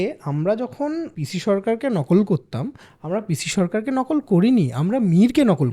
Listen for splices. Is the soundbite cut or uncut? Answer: cut